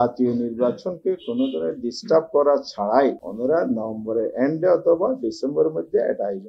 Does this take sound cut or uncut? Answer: uncut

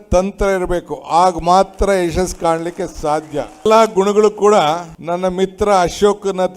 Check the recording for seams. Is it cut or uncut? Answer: cut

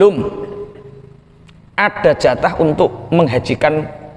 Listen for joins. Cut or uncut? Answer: uncut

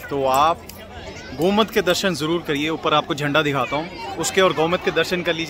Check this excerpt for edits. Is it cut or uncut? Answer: uncut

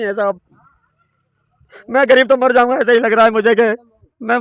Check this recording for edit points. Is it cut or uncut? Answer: uncut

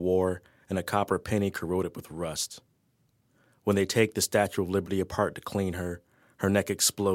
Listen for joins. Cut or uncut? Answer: cut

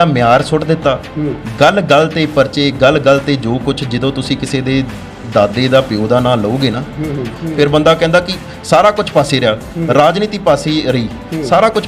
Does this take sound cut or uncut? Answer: cut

